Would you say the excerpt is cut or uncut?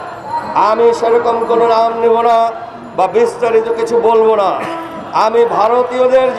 uncut